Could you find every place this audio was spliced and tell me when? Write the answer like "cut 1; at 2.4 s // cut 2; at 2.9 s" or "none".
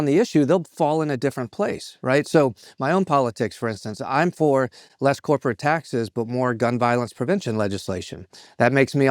cut 1; at 4.8 s